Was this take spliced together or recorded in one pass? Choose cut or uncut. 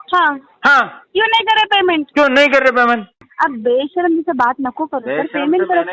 cut